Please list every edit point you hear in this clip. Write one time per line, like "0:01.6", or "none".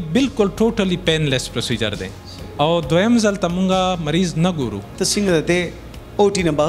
0:04.9